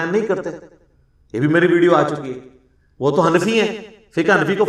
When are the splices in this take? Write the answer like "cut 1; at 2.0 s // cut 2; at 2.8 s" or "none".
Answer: none